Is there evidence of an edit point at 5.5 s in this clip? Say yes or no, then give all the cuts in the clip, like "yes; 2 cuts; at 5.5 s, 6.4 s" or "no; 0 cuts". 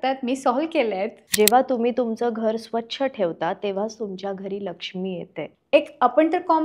yes; 2 cuts; at 1.2 s, 5.5 s